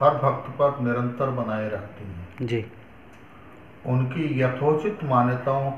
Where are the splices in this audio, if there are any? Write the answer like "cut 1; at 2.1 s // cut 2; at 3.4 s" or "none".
none